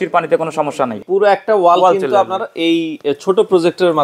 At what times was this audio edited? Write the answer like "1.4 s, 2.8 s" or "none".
1.0 s